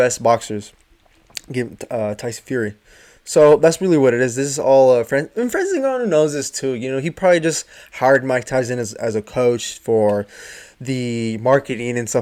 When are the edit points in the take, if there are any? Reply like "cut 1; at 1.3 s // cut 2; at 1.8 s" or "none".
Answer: none